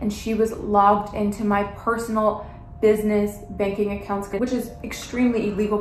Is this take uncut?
yes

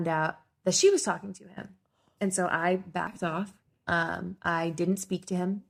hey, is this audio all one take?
yes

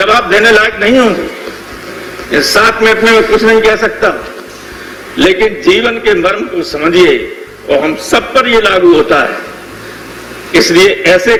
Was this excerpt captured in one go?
yes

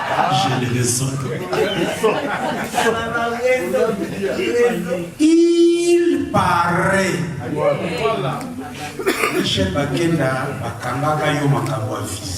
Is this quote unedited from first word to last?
yes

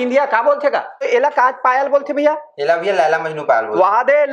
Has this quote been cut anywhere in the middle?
yes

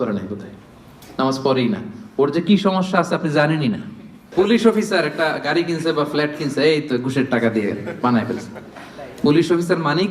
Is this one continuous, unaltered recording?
no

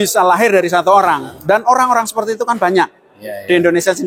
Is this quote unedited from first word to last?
no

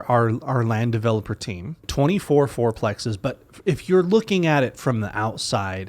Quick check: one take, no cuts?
no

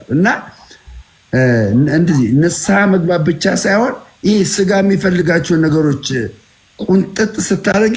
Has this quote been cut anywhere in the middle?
no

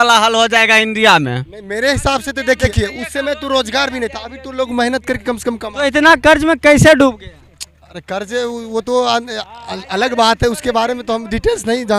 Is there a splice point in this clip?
no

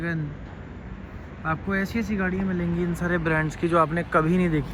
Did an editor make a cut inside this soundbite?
no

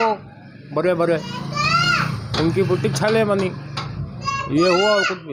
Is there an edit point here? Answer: no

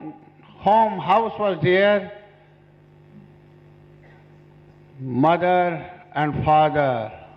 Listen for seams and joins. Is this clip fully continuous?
yes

